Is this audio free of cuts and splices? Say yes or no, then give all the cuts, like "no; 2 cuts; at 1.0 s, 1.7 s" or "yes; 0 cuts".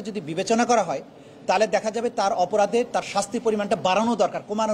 yes; 0 cuts